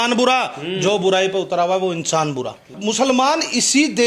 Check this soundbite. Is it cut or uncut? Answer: cut